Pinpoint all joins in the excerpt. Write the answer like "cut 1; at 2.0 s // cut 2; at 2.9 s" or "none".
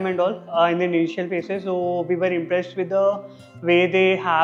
none